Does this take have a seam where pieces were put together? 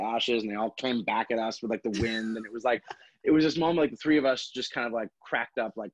no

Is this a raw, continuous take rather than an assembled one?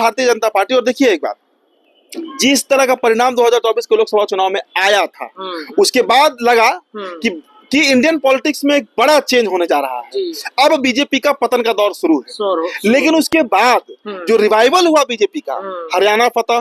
yes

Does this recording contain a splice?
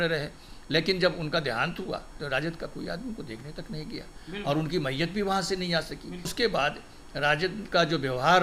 yes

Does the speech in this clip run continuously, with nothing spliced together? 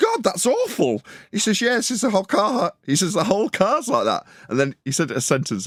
yes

